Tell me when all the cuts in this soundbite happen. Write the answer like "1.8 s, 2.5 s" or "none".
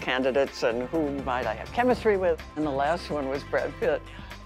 2.5 s